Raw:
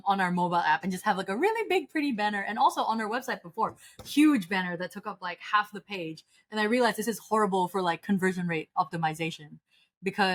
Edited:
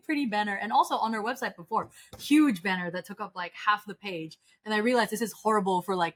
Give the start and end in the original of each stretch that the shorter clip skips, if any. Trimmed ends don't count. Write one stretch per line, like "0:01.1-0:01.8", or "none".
none